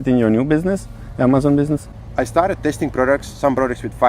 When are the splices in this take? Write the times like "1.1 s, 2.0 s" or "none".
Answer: 2.0 s